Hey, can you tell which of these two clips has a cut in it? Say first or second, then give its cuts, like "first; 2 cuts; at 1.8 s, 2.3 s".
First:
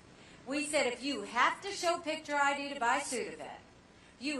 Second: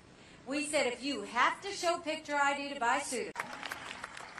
first; 1 cut; at 3.3 s